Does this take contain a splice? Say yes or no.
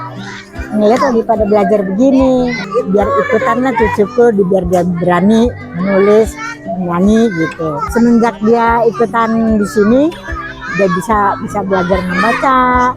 yes